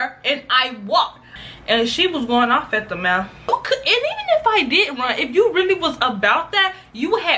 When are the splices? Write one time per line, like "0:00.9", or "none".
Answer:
0:01.4
0:03.5